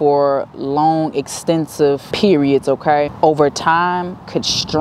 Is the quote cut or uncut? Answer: cut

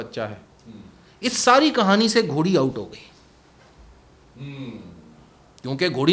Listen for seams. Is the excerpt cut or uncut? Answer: uncut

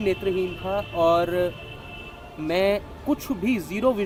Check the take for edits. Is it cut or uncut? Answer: uncut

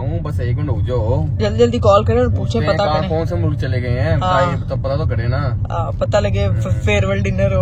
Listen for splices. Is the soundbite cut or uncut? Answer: uncut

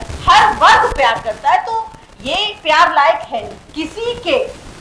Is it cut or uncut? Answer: uncut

